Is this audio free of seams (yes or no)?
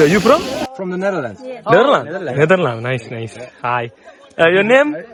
yes